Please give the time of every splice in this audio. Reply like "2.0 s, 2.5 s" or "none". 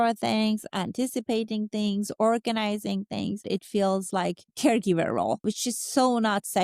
3.4 s, 5.4 s